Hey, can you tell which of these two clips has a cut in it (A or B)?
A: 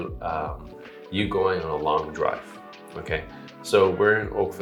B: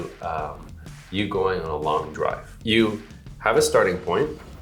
B